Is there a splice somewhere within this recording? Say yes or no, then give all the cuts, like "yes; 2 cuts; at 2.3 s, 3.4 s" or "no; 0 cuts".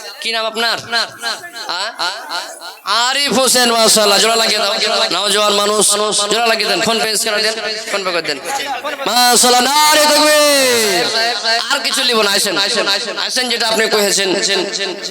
yes; 1 cut; at 11.0 s